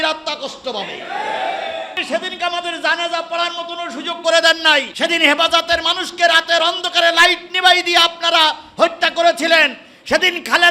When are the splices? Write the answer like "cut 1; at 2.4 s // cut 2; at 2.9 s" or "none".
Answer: cut 1; at 2.0 s // cut 2; at 4.9 s